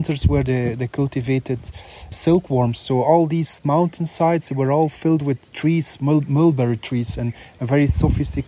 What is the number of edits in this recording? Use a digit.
1